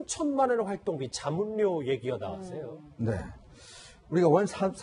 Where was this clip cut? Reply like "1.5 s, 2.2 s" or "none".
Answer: 1.5 s